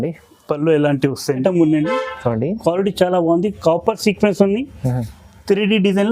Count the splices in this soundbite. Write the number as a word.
one